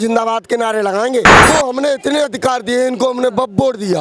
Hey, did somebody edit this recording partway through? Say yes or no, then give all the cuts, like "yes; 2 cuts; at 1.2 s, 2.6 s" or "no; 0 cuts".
yes; 1 cut; at 1.4 s